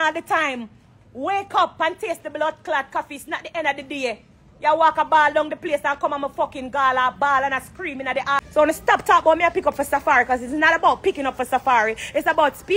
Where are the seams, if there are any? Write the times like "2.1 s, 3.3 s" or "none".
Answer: 8.4 s